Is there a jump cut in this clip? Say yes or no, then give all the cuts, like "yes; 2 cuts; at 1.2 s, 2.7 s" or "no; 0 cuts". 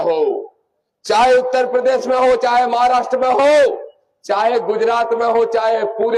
no; 0 cuts